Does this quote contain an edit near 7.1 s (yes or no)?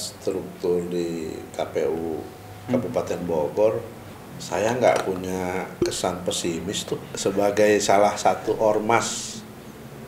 yes